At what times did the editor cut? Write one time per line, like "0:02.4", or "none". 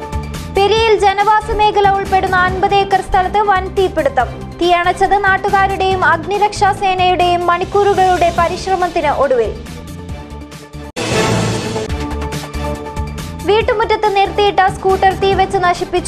none